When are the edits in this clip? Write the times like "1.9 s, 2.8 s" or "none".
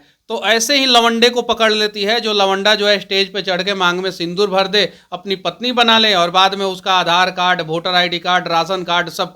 none